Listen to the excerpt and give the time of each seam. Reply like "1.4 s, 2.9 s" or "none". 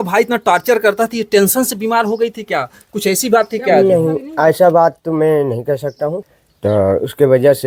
none